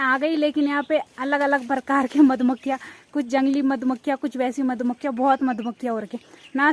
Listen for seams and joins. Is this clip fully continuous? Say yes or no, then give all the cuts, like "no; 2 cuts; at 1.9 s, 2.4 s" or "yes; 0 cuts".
yes; 0 cuts